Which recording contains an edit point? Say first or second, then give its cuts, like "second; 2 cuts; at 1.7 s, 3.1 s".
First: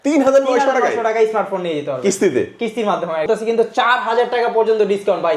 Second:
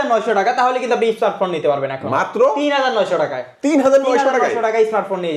first; 1 cut; at 3.2 s